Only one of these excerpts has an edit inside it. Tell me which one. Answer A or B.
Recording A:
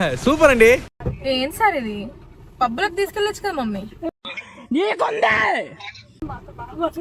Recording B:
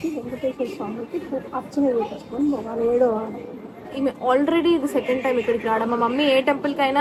A